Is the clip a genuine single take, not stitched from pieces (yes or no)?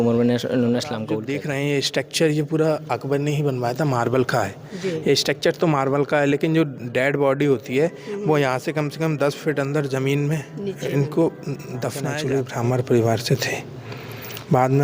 no